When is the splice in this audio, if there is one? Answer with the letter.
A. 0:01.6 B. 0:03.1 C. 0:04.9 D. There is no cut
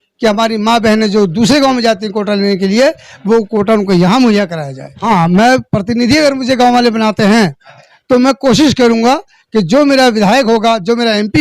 C